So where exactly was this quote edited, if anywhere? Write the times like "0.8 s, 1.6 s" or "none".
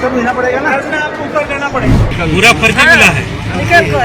2.0 s